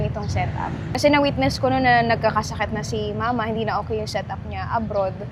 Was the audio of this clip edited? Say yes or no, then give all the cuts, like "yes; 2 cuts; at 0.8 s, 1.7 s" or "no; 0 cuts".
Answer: no; 0 cuts